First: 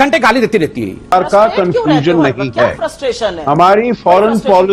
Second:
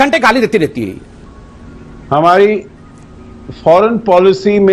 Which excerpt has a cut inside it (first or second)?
first